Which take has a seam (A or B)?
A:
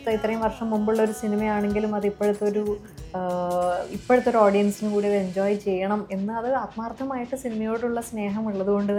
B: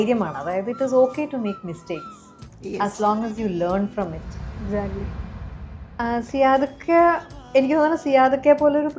B